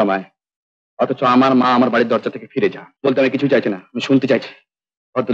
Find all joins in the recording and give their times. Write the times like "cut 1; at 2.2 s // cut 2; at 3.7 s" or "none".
cut 1; at 2.9 s